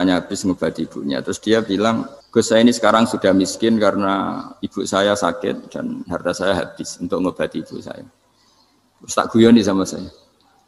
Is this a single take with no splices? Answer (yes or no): no